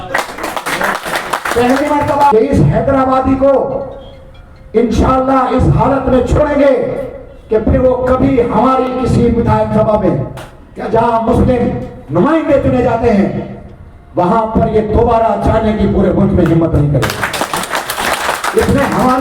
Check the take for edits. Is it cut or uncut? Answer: cut